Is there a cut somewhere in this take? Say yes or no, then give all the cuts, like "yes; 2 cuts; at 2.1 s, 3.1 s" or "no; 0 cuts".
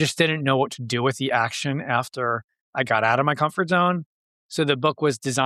no; 0 cuts